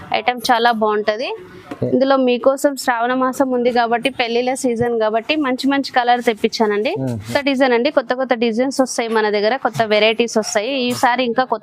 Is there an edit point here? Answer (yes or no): yes